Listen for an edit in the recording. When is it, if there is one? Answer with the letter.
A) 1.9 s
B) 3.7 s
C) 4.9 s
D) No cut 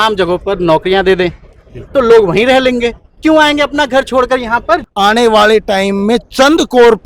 C